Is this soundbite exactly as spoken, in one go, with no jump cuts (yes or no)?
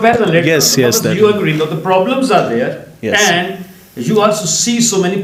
yes